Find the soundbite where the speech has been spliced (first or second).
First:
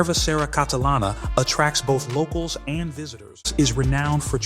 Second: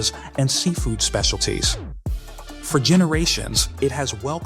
first